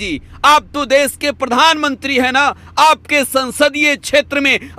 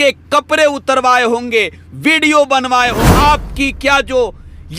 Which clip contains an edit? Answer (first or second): second